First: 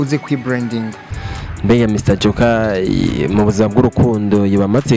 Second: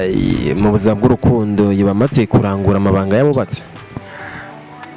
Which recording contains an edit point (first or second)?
first